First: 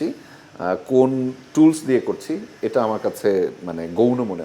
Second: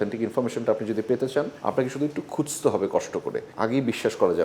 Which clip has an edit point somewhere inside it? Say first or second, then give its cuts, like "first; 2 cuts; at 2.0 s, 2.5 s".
second; 2 cuts; at 1.5 s, 3.5 s